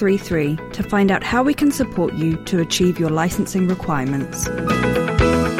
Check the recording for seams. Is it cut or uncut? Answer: cut